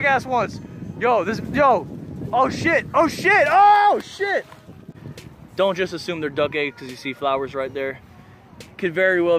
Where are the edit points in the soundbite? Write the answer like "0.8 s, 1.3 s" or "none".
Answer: 4.7 s